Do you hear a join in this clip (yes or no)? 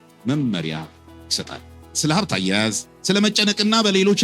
yes